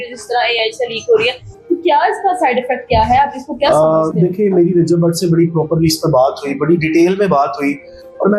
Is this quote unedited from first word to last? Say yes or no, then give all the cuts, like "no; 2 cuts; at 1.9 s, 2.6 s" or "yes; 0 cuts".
yes; 0 cuts